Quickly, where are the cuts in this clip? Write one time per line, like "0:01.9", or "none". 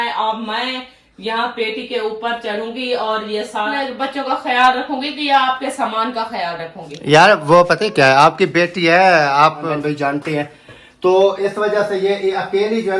0:03.7
0:09.7